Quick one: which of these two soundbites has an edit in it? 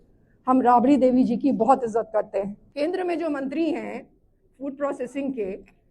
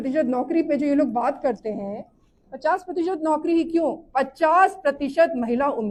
first; 1 cut; at 2.6 s

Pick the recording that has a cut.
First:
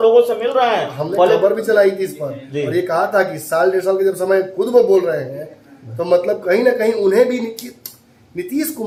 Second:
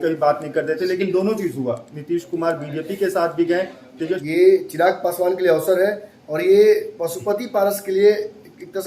second; 1 cut; at 4.2 s

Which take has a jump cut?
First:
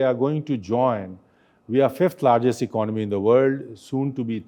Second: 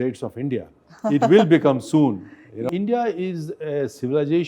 second; 1 cut; at 2.7 s

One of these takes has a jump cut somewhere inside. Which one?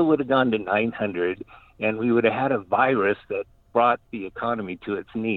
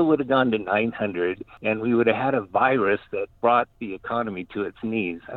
second; 2 cuts; at 1.5 s, 3.3 s

